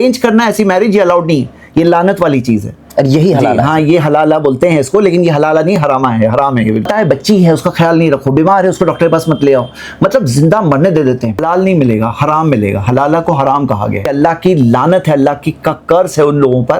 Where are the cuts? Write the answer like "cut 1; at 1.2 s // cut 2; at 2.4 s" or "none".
cut 1; at 6.9 s // cut 2; at 11.4 s // cut 3; at 14.0 s